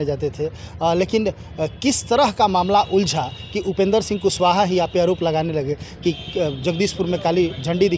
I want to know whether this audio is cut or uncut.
uncut